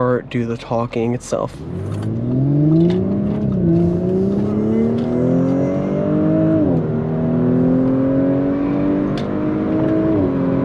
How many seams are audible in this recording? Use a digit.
1